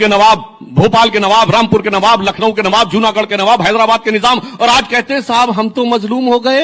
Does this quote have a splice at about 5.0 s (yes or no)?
no